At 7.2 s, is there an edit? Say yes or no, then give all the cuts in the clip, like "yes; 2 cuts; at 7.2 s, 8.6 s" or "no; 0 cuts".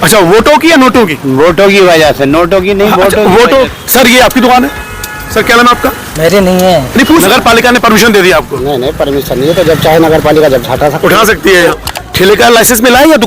yes; 3 cuts; at 3.7 s, 7.2 s, 11.7 s